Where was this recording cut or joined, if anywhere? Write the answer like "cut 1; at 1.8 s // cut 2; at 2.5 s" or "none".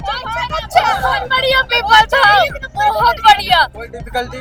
none

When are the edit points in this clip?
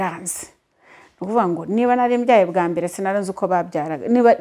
none

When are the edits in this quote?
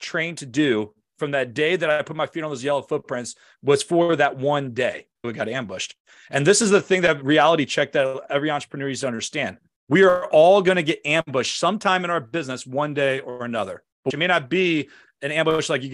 cut 1; at 5.3 s // cut 2; at 14.1 s

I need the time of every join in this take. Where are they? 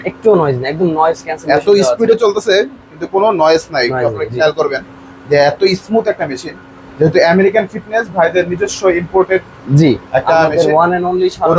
none

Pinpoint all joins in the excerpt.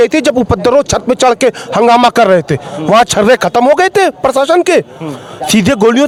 none

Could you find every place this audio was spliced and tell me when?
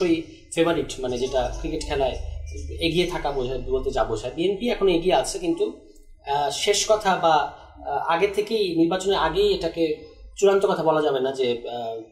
none

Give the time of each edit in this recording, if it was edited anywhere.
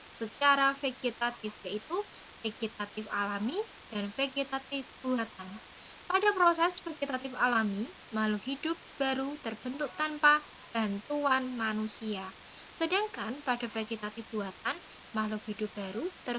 none

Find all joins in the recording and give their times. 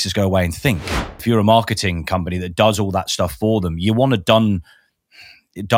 cut 1; at 1.2 s

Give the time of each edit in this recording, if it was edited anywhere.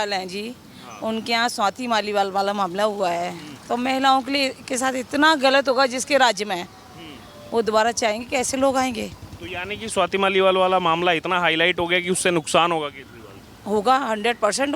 none

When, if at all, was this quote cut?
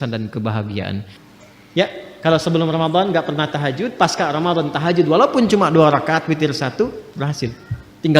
cut 1; at 1.2 s

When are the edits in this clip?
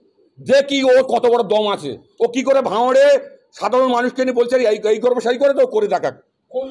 none

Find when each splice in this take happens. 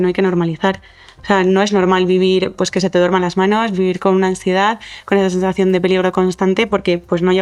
none

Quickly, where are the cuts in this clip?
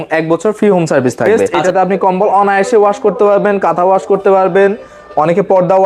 cut 1; at 1.5 s

